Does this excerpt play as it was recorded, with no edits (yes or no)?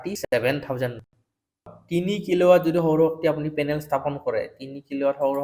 no